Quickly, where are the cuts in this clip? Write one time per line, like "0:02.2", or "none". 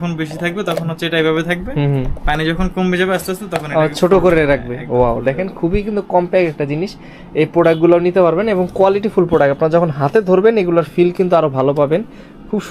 none